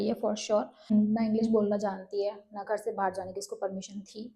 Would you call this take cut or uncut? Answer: cut